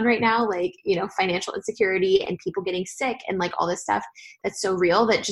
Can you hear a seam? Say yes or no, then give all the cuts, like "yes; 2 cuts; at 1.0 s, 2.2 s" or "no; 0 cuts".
no; 0 cuts